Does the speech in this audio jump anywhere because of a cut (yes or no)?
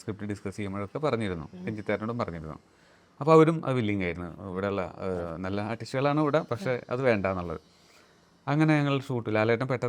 no